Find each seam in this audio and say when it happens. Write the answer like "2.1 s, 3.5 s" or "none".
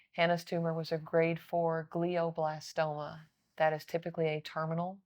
3.4 s